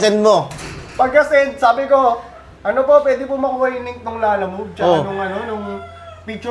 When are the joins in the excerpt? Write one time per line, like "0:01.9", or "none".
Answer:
none